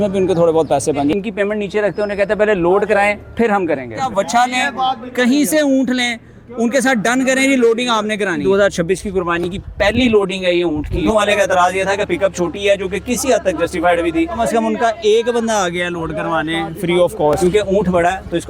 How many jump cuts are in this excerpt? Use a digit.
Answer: 6